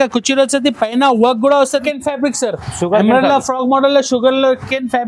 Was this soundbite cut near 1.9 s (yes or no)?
yes